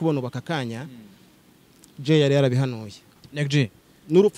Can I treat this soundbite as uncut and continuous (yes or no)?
yes